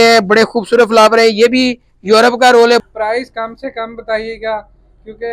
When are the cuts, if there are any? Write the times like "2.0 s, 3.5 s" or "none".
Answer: 2.8 s